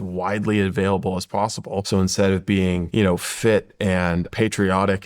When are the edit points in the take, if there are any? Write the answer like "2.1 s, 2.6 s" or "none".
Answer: 1.8 s, 2.8 s, 4.3 s